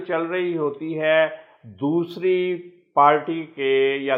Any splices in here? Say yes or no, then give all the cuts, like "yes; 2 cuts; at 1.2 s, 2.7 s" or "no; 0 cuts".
no; 0 cuts